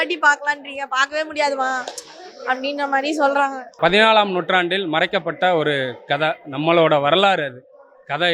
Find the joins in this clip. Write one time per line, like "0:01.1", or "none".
0:03.7